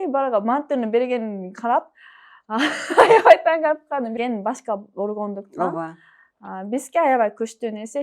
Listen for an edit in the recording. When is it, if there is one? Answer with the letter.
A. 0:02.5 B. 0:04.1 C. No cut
B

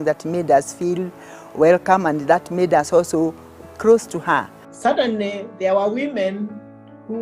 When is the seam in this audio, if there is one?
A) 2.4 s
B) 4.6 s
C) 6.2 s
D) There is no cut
B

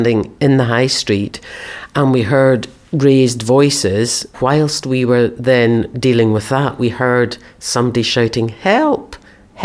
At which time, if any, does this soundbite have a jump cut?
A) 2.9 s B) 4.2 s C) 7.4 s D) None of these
B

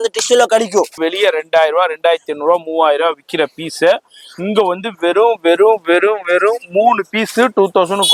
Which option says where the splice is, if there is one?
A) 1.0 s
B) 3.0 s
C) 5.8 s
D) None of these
A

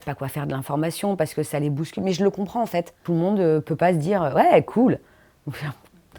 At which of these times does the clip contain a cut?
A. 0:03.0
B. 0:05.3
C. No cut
A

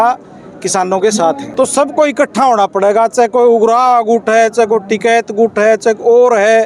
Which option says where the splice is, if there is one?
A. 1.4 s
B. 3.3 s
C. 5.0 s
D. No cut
A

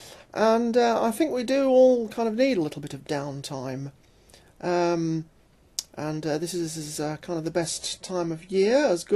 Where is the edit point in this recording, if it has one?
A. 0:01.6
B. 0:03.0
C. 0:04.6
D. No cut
A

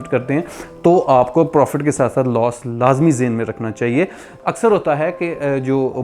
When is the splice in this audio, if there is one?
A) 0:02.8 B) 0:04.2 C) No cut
B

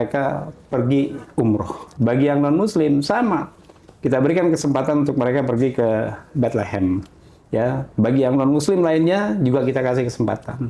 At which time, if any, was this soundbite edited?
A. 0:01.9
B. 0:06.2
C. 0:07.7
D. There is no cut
A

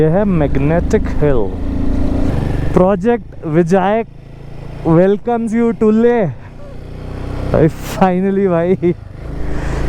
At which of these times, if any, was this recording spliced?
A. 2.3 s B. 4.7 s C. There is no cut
A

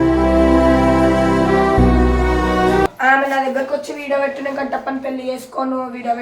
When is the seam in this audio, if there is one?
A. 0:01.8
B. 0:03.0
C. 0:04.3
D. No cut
B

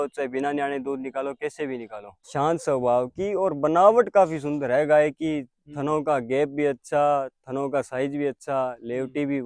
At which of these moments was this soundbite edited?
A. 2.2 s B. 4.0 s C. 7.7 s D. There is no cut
A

